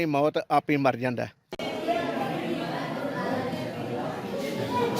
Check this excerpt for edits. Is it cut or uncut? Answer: cut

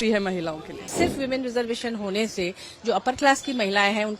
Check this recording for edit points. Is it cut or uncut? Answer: cut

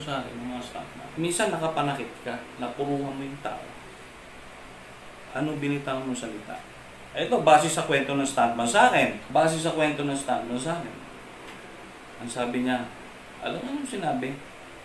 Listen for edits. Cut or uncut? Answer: uncut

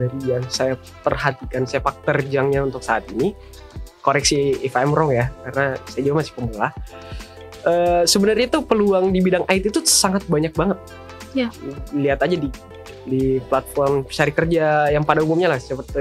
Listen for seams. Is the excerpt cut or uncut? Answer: uncut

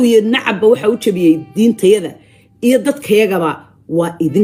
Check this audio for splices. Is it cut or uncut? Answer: uncut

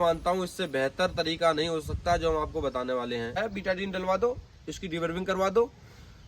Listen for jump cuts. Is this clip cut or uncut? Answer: cut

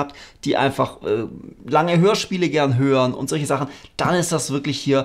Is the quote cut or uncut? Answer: uncut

